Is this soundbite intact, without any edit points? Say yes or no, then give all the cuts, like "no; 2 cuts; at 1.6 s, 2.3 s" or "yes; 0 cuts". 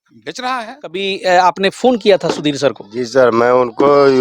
no; 1 cut; at 1.1 s